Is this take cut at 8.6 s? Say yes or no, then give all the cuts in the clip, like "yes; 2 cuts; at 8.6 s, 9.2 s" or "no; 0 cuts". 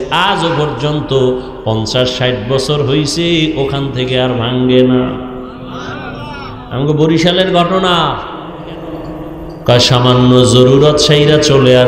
yes; 1 cut; at 8.6 s